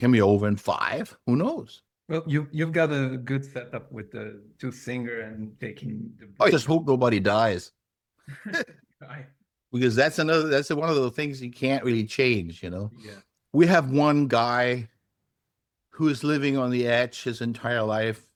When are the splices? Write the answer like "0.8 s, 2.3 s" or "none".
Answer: none